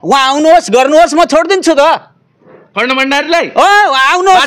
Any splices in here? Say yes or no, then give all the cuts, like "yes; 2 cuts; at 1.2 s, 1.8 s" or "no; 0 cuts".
no; 0 cuts